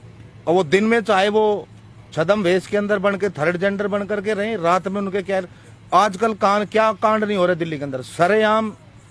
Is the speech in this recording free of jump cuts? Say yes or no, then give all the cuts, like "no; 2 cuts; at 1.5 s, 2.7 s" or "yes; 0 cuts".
yes; 0 cuts